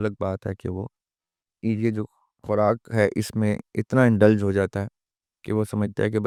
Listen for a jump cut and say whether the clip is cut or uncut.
uncut